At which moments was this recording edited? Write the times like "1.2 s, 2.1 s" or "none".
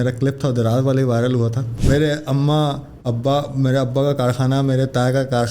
1.7 s